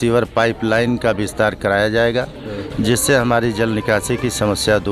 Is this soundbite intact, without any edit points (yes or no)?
yes